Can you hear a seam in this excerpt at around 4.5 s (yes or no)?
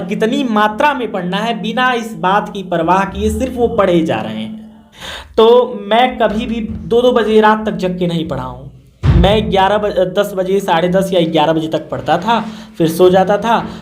yes